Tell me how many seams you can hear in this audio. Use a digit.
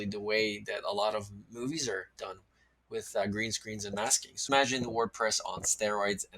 1